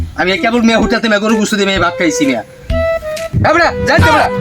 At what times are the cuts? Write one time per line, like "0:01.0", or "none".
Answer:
0:03.4

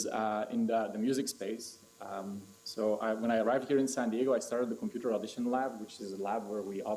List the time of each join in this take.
0:00.9

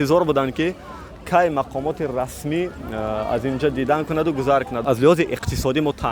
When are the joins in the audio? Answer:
0:04.7

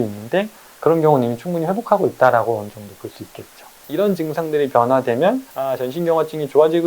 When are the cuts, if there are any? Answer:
0:03.7
0:05.5

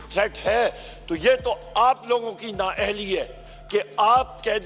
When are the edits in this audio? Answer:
none

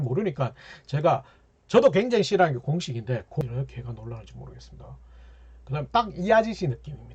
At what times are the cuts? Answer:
0:03.4

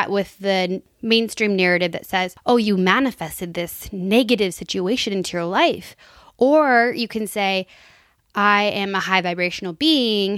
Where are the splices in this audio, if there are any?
0:02.3

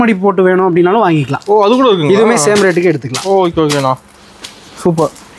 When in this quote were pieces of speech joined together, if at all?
none

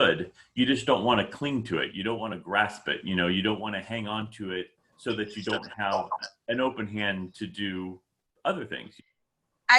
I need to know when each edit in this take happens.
0:08.9

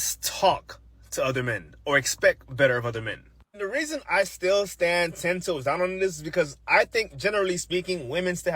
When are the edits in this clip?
0:04.3

